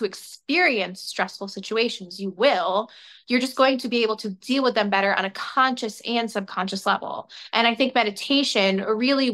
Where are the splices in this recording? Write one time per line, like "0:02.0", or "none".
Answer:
none